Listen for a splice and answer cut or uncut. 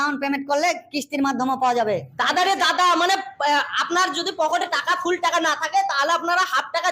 uncut